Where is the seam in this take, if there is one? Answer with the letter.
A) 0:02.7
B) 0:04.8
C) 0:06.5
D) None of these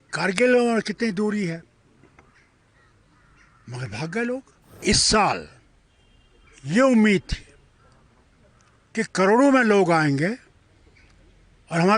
B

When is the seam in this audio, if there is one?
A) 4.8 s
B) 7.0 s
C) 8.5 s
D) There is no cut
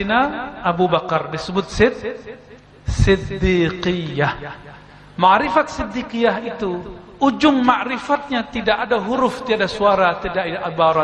D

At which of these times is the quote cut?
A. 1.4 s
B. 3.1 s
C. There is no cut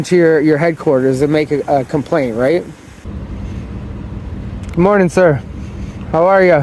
B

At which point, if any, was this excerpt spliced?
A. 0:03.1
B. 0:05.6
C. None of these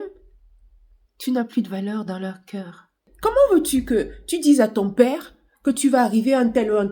A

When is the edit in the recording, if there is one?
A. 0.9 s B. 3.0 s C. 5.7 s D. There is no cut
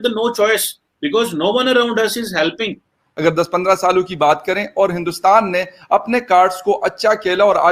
B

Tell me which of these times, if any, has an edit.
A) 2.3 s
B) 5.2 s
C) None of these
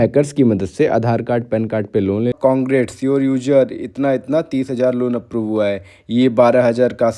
A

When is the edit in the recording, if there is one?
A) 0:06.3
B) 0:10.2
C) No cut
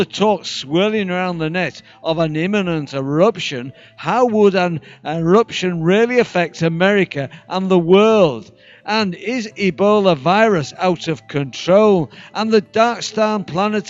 A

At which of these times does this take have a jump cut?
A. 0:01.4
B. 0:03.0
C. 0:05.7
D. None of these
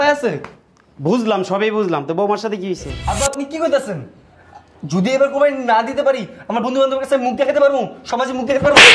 B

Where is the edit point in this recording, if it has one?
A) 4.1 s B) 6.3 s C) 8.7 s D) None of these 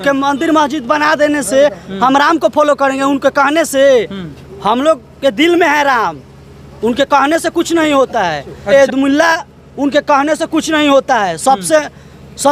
C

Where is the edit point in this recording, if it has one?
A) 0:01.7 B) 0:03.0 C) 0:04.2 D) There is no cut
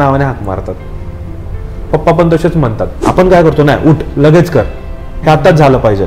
B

